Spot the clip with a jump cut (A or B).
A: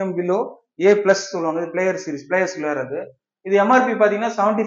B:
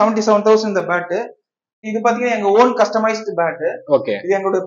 B